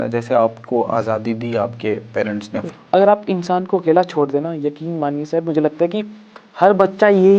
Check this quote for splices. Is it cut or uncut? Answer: cut